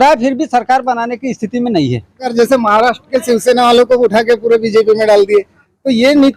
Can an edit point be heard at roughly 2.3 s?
yes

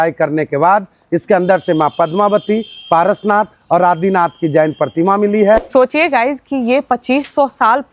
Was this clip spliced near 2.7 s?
no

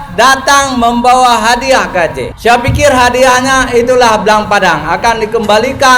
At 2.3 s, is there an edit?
yes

